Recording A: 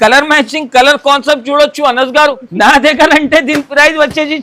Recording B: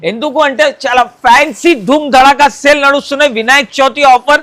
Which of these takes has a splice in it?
A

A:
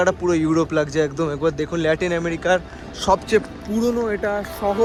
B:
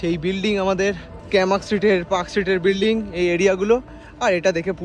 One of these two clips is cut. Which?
B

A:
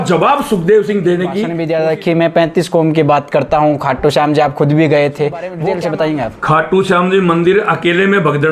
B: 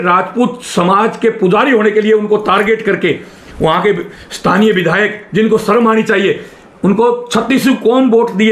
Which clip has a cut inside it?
A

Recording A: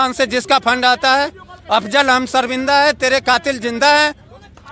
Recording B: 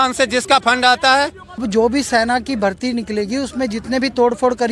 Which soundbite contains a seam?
B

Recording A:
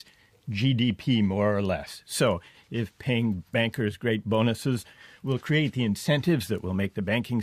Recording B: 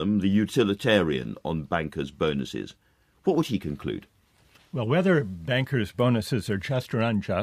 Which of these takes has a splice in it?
B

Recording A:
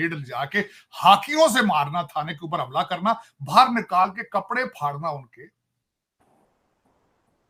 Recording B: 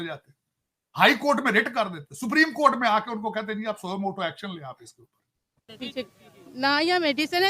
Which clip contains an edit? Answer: B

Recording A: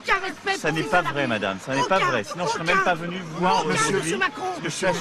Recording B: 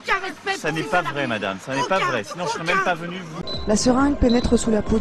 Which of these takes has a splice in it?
A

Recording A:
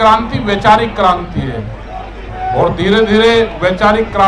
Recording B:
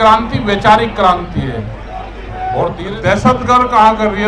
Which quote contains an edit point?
B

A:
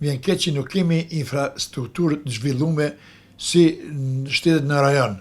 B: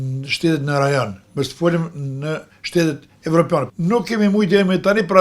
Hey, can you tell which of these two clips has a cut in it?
B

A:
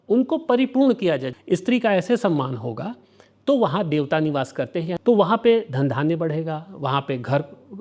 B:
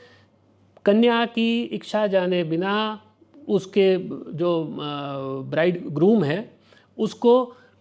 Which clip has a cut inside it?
A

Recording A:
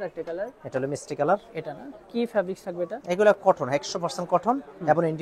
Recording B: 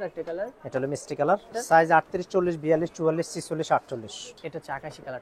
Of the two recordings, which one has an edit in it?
B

